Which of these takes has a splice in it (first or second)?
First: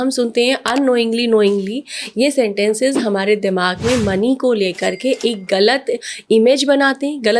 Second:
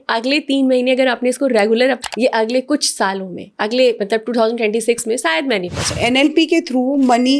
second